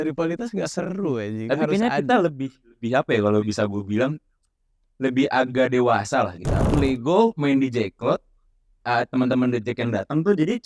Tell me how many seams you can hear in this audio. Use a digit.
1